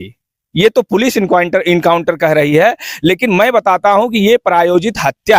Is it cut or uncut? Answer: uncut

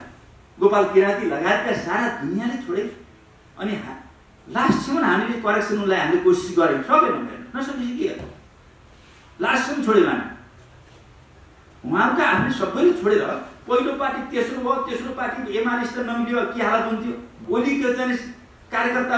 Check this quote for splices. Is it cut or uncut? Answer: cut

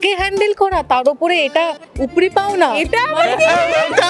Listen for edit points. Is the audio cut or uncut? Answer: uncut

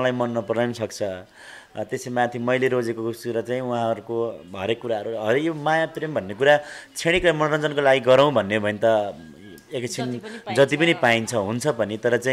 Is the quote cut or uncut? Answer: uncut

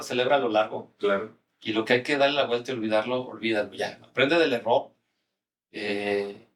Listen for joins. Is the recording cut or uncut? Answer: uncut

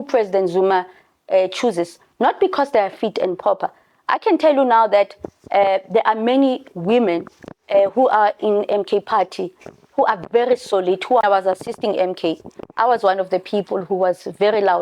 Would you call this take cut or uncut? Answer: cut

